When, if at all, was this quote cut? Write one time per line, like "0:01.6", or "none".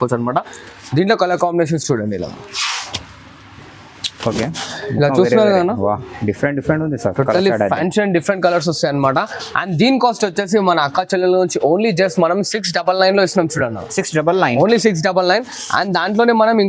none